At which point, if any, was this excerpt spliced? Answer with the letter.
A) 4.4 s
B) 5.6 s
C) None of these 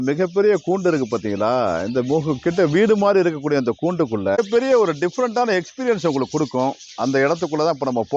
A